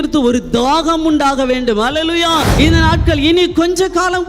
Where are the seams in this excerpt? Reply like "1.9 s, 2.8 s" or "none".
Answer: 2.5 s